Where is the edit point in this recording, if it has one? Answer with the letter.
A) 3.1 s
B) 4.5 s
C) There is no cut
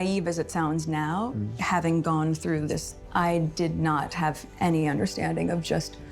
A